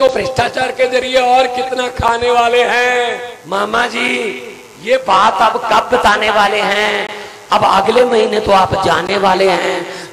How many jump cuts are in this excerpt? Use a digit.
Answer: 1